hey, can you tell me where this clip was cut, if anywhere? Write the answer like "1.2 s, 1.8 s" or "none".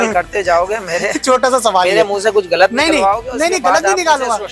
none

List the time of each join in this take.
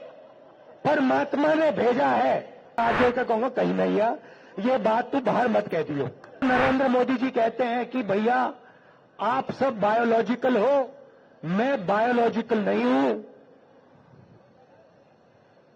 2.8 s, 6.4 s

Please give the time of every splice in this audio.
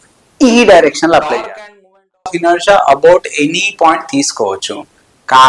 2.2 s

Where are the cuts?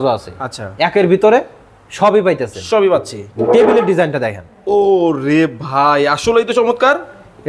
none

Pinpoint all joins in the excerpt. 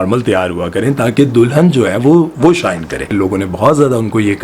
3.1 s

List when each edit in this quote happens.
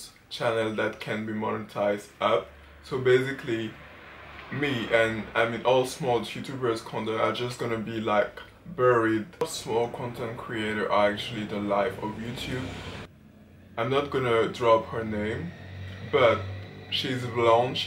9.4 s, 13.1 s

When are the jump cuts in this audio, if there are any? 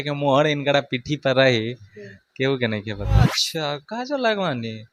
3.2 s

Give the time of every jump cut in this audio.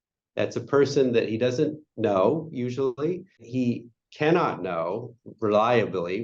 3.5 s

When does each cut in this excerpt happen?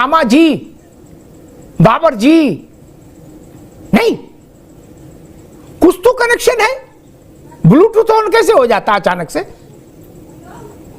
none

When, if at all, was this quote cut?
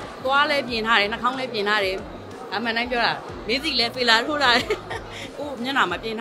5.3 s

